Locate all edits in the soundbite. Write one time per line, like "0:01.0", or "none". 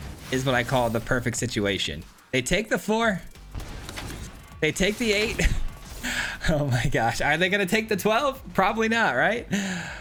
none

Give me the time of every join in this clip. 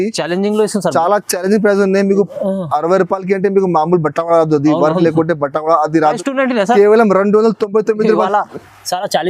0:06.2

